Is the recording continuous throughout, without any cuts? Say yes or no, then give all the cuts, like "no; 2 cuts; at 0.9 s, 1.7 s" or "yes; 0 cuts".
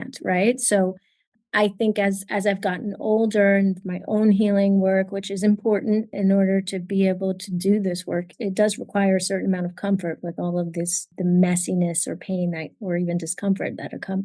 no; 3 cuts; at 6.1 s, 8.3 s, 11.1 s